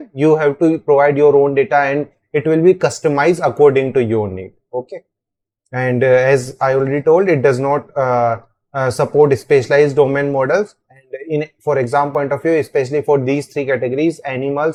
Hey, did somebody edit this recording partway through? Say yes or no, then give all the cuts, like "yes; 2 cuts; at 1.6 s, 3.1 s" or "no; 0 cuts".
no; 0 cuts